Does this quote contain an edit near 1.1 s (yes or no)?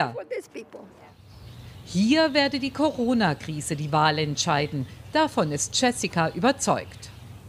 no